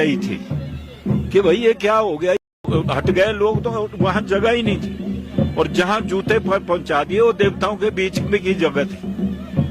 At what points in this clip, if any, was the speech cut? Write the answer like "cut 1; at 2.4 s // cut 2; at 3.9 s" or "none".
cut 1; at 2.5 s